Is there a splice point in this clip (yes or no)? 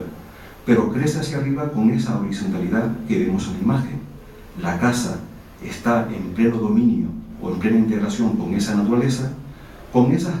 yes